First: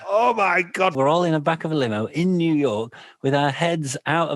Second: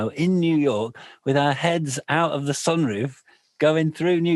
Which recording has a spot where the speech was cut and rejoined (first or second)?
first